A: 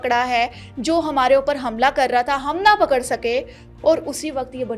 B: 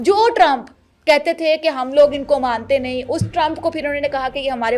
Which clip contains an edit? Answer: A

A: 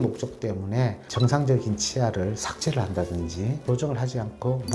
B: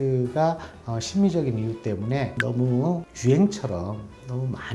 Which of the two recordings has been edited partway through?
A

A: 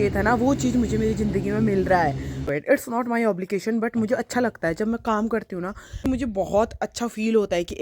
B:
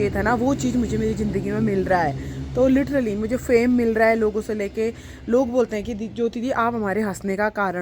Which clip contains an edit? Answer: A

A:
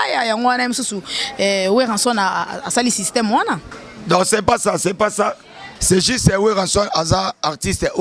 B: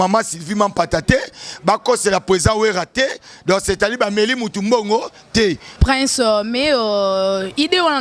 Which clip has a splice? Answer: B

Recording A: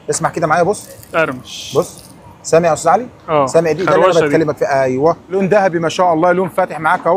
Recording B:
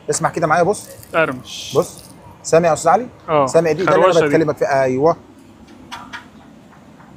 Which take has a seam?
A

